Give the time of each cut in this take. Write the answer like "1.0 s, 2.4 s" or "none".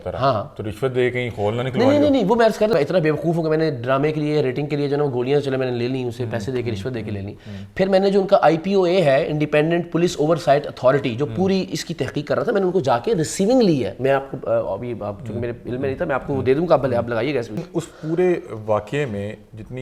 2.7 s, 17.6 s